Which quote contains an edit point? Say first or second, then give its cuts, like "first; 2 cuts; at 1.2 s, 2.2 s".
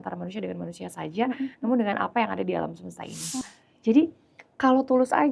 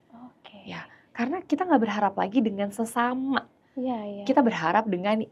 first; 1 cut; at 3.4 s